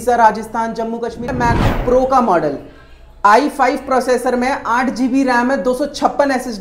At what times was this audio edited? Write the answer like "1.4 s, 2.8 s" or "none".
1.3 s